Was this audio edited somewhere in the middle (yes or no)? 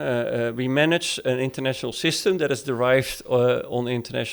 no